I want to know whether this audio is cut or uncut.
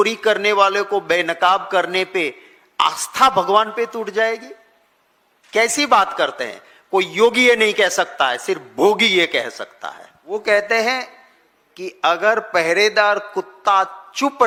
uncut